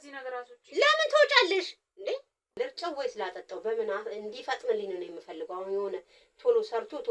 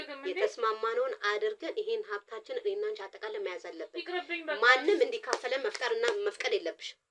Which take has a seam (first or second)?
first